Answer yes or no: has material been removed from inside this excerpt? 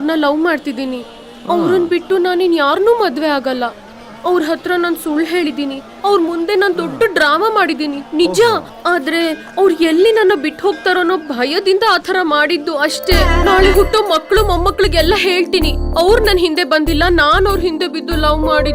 no